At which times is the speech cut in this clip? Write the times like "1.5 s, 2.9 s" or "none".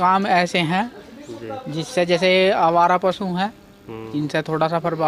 none